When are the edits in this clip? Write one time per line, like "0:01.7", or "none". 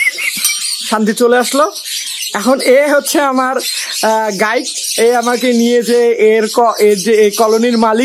none